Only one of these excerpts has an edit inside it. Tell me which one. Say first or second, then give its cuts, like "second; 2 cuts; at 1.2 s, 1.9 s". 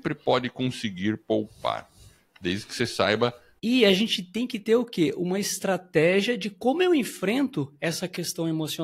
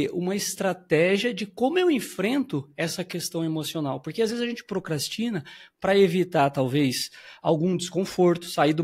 first; 1 cut; at 3.5 s